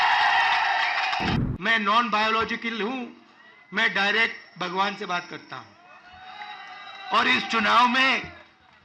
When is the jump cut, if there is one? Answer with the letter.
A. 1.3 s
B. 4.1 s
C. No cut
A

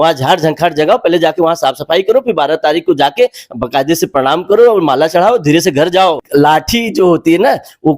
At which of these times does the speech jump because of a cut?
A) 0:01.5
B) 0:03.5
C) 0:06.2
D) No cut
C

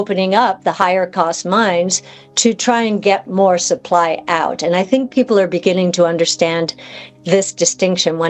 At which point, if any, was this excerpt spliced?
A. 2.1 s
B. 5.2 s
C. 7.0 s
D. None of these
D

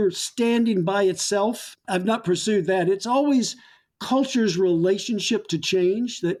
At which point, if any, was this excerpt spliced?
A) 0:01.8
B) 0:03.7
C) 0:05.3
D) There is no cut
D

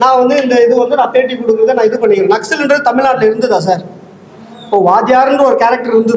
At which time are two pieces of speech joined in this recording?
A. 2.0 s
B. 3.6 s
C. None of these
C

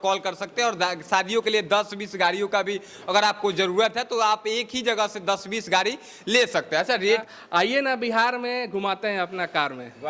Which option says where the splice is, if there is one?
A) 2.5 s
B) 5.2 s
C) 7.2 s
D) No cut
C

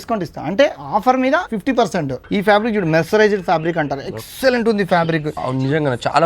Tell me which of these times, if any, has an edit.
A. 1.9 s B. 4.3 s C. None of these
A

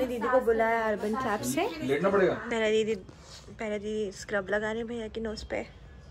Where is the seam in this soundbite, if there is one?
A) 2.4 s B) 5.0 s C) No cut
A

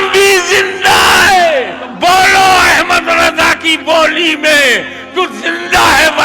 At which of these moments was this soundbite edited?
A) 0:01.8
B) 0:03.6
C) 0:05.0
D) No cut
A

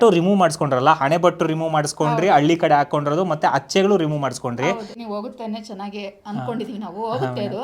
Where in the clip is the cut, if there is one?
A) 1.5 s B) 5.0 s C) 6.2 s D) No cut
B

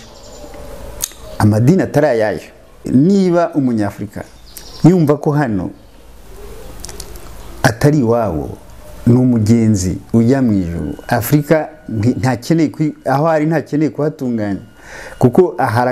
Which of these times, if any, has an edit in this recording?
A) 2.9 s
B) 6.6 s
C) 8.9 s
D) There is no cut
A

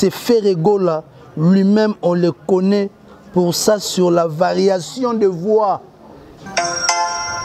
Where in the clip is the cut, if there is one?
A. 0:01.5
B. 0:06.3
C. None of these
B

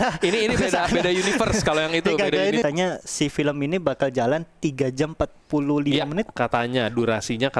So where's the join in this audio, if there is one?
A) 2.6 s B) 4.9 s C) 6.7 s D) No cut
A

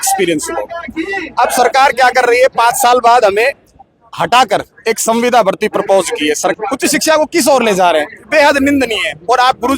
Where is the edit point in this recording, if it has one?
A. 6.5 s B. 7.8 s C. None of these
A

